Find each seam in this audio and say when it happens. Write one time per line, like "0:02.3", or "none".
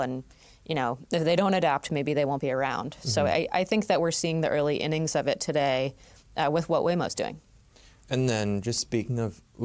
none